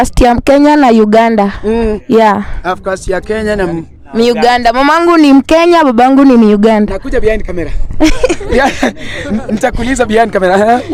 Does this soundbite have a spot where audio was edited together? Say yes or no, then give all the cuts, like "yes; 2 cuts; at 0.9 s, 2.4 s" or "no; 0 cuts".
no; 0 cuts